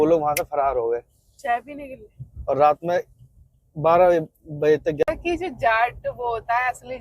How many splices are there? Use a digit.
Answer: 1